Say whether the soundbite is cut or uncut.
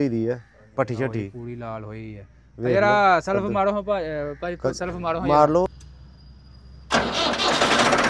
cut